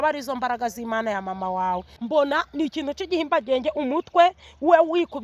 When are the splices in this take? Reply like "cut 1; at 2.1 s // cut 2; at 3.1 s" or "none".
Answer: cut 1; at 1.9 s